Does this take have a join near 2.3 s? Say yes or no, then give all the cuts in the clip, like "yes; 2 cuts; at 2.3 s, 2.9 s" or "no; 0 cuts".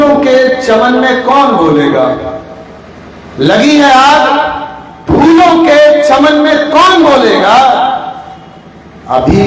no; 0 cuts